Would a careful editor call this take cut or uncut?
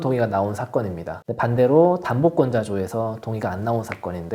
uncut